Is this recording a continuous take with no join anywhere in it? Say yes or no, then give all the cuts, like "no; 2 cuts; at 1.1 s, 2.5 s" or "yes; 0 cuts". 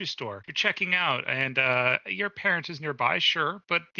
yes; 0 cuts